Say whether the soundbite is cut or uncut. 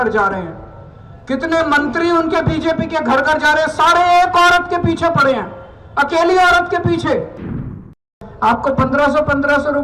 cut